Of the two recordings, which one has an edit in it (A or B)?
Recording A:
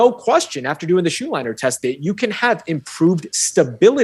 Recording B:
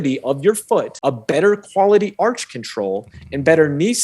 B